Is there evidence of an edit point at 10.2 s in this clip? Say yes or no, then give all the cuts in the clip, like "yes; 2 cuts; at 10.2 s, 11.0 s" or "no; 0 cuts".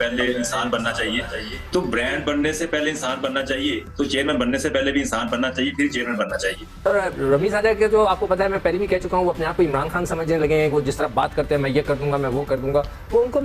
no; 1 cut; at 6.7 s